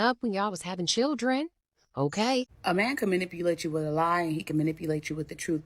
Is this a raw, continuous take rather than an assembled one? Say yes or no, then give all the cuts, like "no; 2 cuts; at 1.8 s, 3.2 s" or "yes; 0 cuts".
no; 1 cut; at 2.5 s